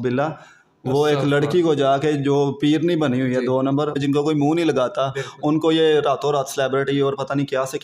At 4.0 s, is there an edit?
yes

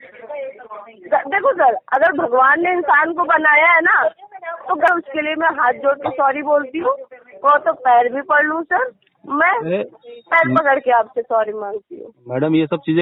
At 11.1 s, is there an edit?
no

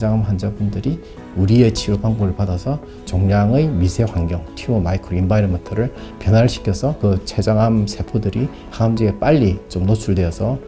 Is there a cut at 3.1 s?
yes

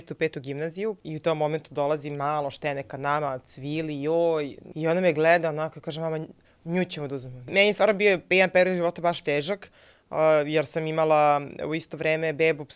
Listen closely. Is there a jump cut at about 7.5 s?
yes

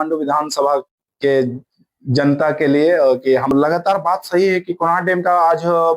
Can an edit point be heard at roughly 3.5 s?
yes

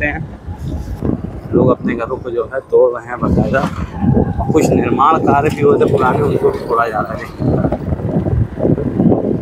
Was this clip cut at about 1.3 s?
yes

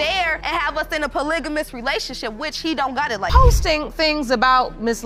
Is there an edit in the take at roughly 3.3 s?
yes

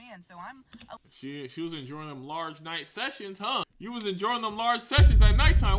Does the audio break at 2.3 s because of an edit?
no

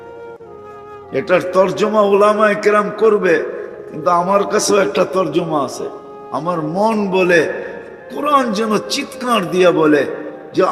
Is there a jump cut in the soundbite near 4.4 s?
no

